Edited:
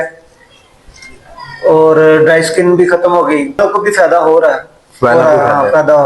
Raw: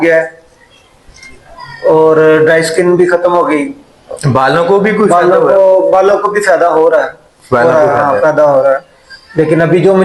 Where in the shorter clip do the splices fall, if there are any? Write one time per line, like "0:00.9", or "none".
0:03.6